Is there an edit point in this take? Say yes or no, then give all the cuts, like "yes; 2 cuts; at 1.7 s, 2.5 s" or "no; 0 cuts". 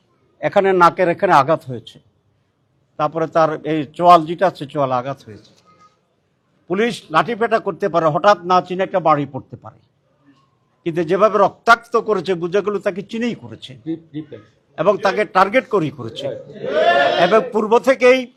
no; 0 cuts